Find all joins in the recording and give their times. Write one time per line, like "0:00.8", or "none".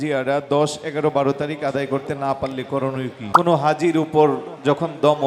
0:03.3